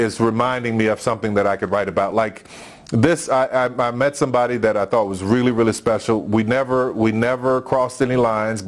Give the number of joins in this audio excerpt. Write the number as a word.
zero